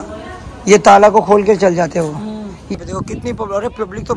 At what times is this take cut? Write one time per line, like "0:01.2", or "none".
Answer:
0:02.7